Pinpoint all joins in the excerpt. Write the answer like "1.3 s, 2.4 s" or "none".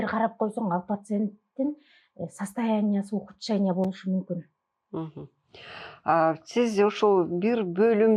none